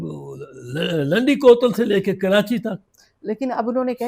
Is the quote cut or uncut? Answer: uncut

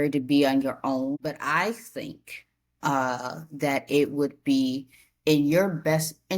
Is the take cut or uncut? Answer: cut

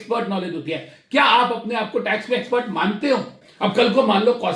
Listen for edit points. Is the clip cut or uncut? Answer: cut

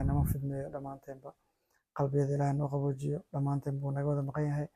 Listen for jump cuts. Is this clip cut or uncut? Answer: uncut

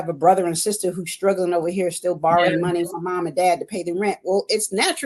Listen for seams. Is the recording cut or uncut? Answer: uncut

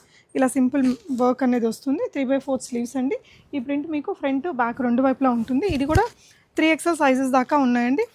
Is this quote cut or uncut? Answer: uncut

